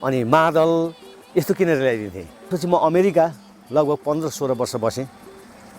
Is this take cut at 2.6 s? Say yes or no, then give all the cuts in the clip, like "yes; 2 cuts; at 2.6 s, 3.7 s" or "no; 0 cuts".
yes; 1 cut; at 2.6 s